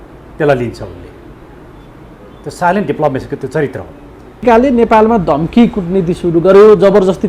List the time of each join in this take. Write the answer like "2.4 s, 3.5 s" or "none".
4.4 s